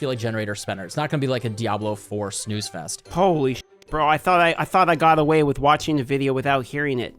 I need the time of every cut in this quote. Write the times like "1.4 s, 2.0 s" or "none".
3.1 s